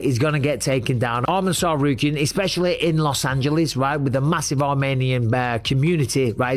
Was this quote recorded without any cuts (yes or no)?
yes